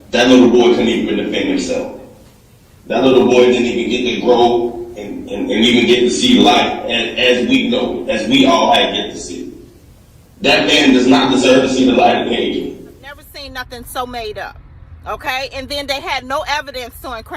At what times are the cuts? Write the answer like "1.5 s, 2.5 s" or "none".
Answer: 13.3 s